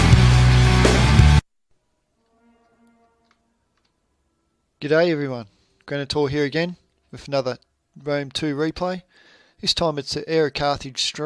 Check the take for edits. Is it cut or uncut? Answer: uncut